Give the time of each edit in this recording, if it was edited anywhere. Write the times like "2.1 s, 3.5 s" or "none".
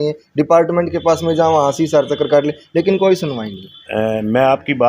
3.8 s